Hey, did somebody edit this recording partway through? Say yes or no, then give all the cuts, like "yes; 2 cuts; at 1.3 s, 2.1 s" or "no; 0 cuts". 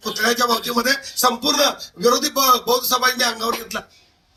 no; 0 cuts